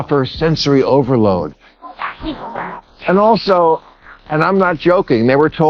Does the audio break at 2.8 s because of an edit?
yes; 1 cut; at 2.8 s

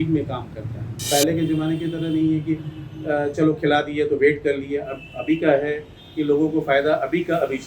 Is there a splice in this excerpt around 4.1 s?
no; 1 cut; at 1.1 s

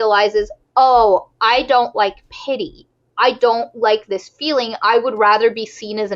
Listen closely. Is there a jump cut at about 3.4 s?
no; 0 cuts

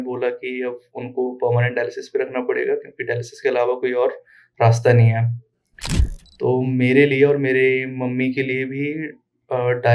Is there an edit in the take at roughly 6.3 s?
no; 0 cuts

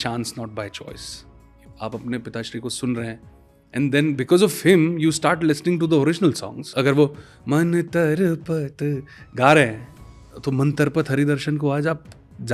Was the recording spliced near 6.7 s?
yes; 2 cuts; at 1.6 s, 6.7 s

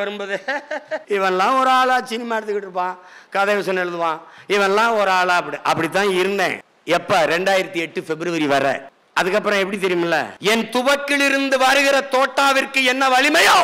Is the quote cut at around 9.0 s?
no; 3 cuts; at 1.0 s, 6.7 s, 10.3 s

